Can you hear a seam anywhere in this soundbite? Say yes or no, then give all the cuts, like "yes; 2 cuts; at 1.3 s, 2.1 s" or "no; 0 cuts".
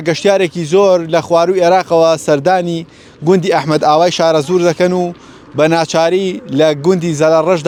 no; 0 cuts